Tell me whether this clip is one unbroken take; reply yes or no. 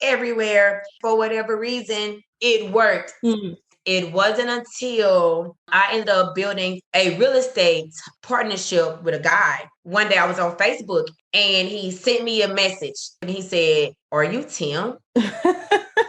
no